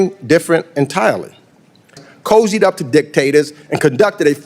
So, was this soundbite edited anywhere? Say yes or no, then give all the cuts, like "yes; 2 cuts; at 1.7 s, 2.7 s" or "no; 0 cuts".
yes; 1 cut; at 2.0 s